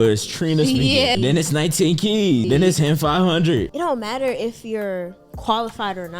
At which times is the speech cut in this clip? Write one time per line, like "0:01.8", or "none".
0:01.1
0:02.4
0:03.7